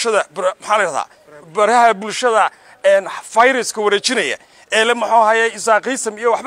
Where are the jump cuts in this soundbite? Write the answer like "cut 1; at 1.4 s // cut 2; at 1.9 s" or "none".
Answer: none